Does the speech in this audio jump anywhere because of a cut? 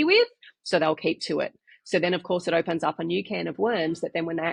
no; 0 cuts

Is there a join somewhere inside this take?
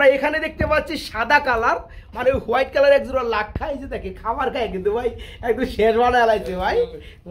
no; 0 cuts

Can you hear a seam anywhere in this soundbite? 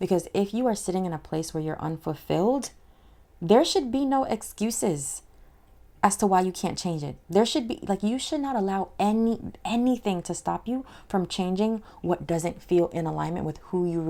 no; 0 cuts

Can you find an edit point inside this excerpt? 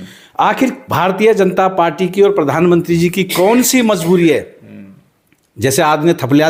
no; 0 cuts

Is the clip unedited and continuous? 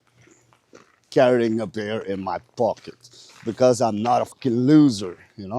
no; 1 cut; at 4.4 s

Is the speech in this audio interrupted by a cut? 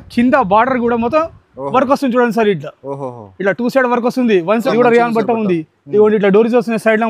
yes; 1 cut; at 4.6 s

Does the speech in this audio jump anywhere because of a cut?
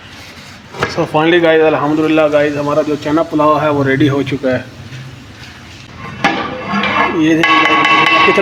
no; 0 cuts

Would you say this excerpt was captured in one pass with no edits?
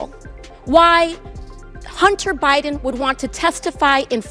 yes; 0 cuts

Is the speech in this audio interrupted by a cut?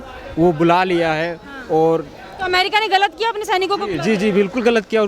no; 0 cuts

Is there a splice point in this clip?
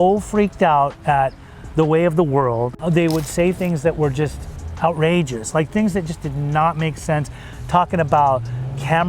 yes; 1 cut; at 2.8 s

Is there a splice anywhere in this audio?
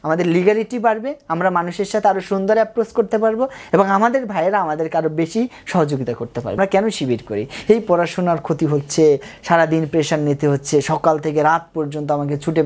yes; 1 cut; at 6.5 s

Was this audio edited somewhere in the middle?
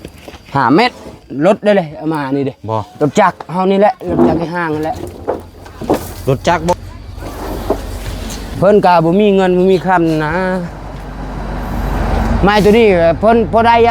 yes; 1 cut; at 6.7 s

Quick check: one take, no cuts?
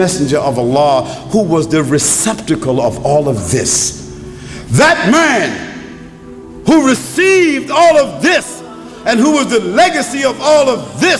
yes; 0 cuts

